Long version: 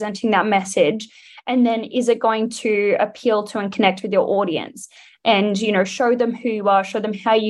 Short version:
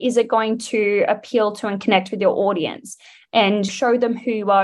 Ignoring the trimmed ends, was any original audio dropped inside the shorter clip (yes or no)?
yes